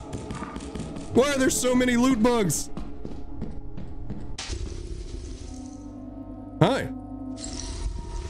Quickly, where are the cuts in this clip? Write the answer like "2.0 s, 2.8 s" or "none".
4.3 s